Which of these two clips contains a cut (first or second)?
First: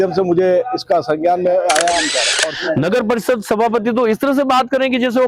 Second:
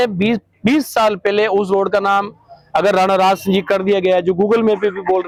first